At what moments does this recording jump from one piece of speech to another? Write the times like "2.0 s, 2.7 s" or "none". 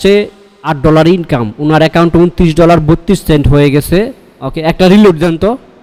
none